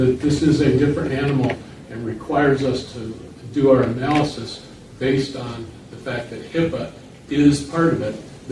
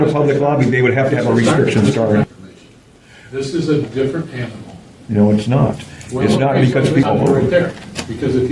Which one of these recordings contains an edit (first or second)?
second